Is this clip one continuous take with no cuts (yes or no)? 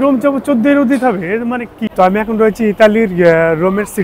no